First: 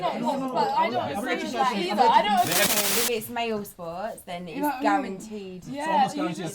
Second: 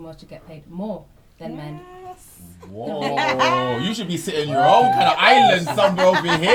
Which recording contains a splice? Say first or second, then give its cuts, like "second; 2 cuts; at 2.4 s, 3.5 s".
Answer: first; 1 cut; at 2.7 s